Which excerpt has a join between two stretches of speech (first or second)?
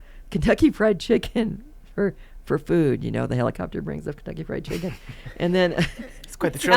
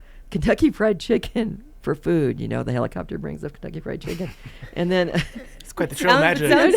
second